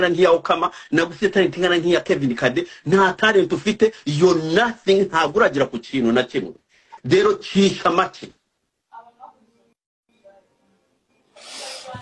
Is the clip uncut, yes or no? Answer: yes